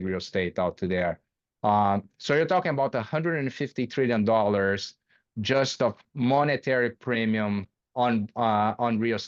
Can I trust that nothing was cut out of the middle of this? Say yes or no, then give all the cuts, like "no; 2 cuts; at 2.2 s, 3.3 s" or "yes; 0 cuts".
yes; 0 cuts